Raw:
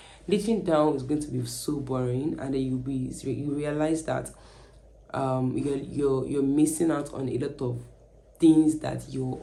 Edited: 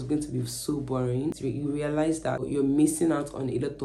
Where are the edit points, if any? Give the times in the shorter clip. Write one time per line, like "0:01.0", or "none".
0:01.4
0:02.4